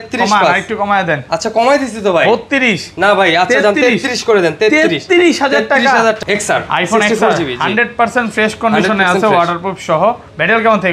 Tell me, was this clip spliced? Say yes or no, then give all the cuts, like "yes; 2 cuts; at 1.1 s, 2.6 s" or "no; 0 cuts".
yes; 1 cut; at 6.2 s